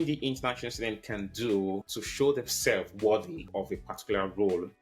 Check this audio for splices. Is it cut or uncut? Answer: cut